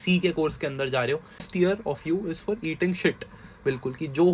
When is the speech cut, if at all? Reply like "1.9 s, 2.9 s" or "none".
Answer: 1.5 s